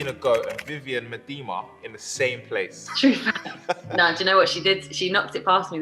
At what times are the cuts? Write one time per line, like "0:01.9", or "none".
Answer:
0:02.8
0:03.9

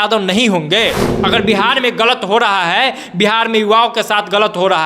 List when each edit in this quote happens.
0:01.1

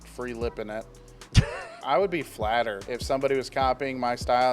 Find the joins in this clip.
0:01.8
0:02.9

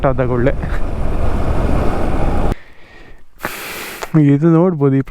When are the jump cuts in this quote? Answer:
0:02.5

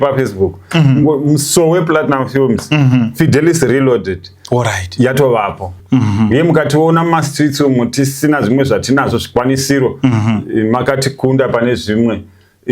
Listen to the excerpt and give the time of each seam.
0:05.8

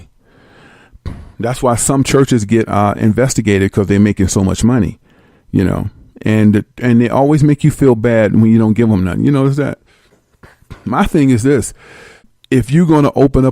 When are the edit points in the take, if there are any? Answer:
0:08.0

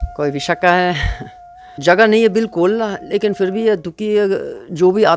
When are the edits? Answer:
0:01.7

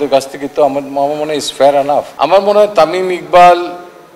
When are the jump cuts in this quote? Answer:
0:02.1

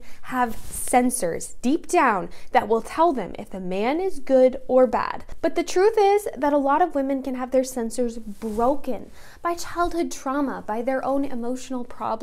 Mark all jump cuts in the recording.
none

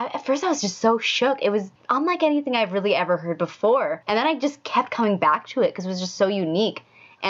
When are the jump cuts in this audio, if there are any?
0:01.8
0:04.0

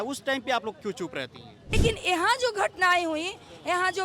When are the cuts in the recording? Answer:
0:01.8

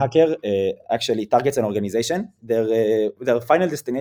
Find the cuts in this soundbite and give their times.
none

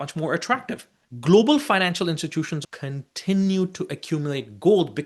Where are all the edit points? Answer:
0:00.9
0:02.6

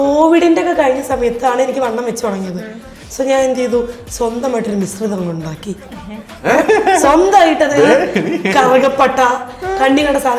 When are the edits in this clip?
none

